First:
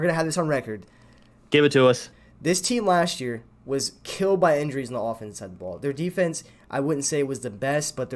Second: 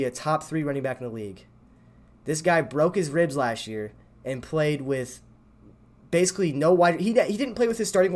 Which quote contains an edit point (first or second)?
first